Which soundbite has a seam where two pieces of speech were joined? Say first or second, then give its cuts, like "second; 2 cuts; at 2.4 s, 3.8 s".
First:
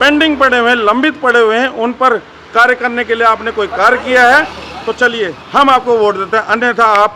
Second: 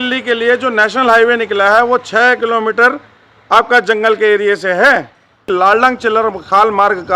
second; 1 cut; at 5.4 s